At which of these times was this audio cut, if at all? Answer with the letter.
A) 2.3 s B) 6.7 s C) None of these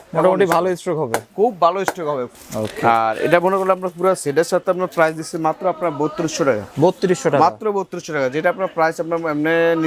A